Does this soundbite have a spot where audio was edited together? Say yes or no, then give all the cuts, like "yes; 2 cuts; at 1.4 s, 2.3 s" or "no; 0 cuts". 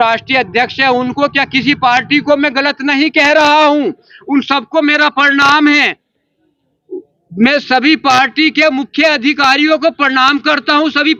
no; 0 cuts